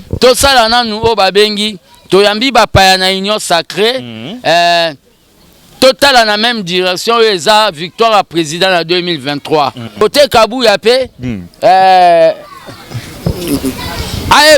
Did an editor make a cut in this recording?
yes; 1 cut; at 10.0 s

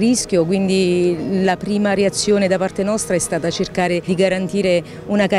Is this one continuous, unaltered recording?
no; 1 cut; at 4.0 s

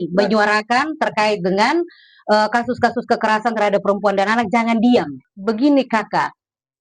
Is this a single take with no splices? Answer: no; 1 cut; at 5.2 s

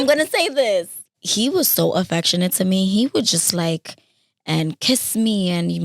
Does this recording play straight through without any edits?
no; 1 cut; at 1.2 s

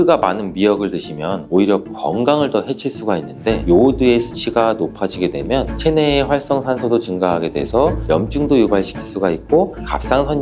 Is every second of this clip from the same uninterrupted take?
no; 1 cut; at 3.6 s

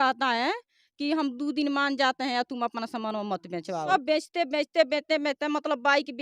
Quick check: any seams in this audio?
yes; 1 cut; at 3.9 s

